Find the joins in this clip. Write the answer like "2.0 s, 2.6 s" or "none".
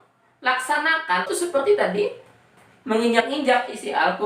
1.3 s

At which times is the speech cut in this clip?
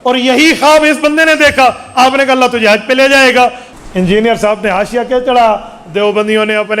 3.6 s

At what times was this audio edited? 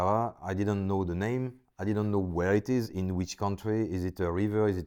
none

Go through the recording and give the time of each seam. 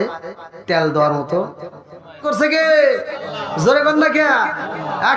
2.2 s

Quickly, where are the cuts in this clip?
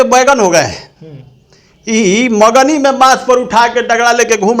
none

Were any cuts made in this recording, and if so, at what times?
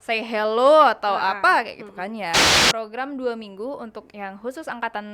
2.6 s

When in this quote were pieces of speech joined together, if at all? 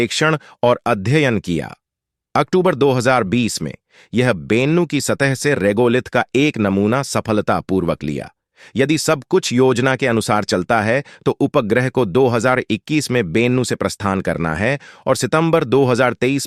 none

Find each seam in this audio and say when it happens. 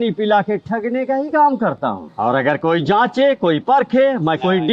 2.1 s

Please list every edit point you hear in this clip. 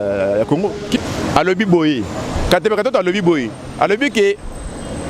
1.0 s

